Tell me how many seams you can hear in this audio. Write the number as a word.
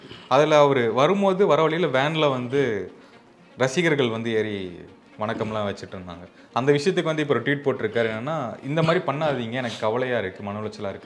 zero